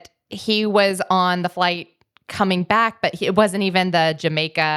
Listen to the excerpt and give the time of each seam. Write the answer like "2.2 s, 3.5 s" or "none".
none